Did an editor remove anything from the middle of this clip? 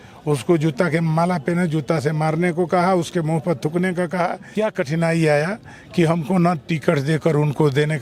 yes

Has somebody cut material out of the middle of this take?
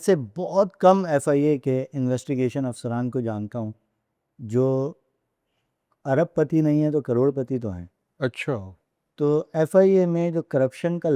no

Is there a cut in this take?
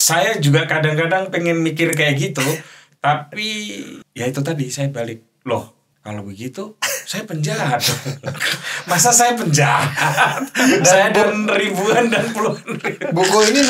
yes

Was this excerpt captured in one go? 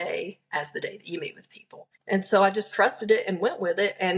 no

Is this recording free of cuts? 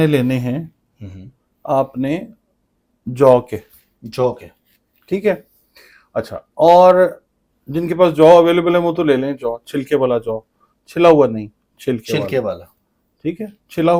yes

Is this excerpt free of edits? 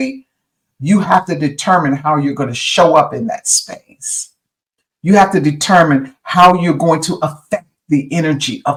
yes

